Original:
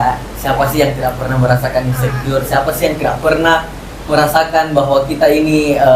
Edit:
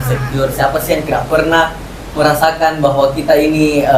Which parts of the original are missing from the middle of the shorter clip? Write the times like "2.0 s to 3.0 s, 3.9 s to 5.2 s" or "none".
none